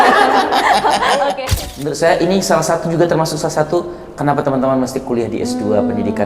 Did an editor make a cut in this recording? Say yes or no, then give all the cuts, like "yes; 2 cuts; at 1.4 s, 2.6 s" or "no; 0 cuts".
yes; 1 cut; at 1.4 s